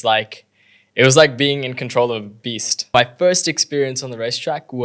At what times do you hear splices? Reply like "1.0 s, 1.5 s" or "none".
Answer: 2.9 s